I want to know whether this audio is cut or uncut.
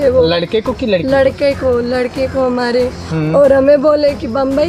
uncut